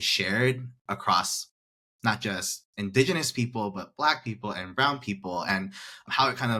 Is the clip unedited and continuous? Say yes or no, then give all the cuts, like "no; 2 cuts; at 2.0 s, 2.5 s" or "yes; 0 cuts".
yes; 0 cuts